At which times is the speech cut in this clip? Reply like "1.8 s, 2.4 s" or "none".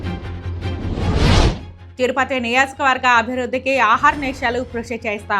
1.7 s